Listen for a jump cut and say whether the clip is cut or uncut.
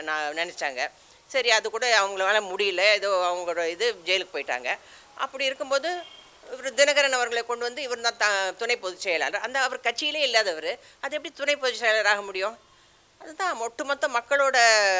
uncut